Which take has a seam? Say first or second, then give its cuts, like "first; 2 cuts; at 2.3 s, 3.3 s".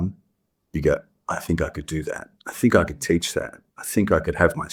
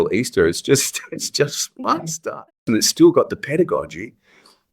second; 1 cut; at 2.6 s